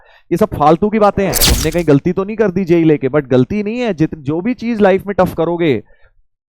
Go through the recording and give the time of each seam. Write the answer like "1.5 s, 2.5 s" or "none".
1.5 s